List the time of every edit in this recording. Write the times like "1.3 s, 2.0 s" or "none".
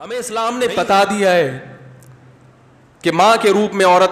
none